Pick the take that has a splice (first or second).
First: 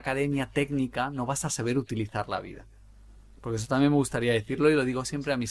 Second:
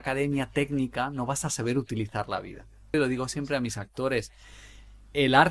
second